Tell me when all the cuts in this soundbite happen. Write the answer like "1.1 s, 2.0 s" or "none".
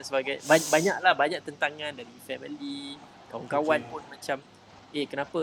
none